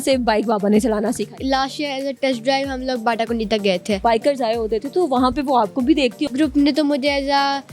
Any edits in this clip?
yes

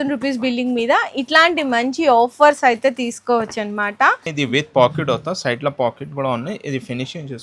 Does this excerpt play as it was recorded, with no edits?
no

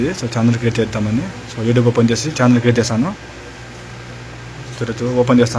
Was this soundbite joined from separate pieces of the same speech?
no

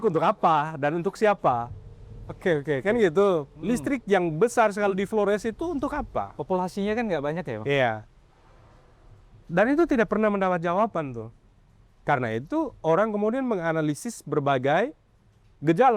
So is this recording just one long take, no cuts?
yes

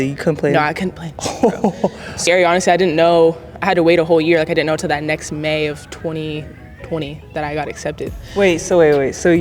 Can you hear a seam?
yes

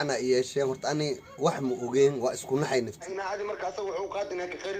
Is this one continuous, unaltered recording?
no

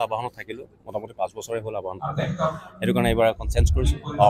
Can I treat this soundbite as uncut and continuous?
yes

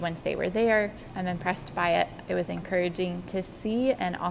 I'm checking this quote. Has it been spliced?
yes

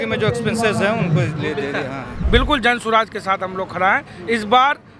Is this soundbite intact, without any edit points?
no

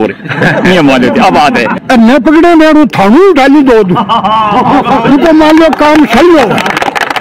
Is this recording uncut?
no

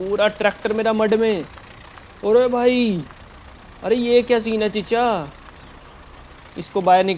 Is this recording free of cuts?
yes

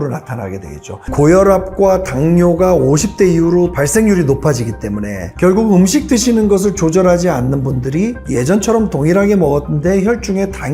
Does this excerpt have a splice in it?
yes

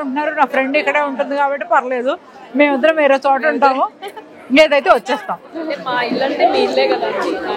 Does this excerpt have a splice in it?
no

